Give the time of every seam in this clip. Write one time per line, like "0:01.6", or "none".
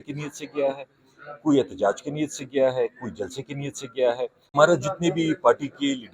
0:04.5